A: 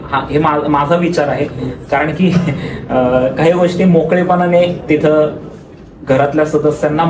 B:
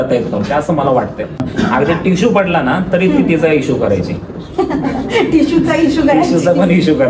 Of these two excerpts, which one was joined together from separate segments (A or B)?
B